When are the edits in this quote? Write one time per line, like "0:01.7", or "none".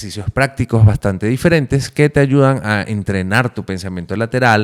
none